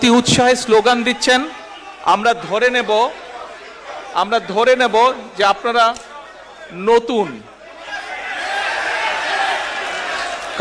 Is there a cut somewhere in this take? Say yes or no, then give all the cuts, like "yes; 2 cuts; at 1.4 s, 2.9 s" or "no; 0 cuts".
no; 0 cuts